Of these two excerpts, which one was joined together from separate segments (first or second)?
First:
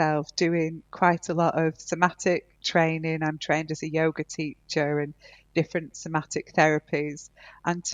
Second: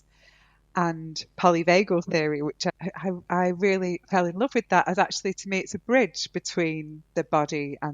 second